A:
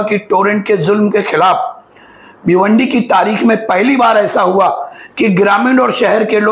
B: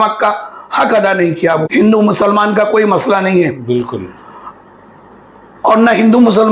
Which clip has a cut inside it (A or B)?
B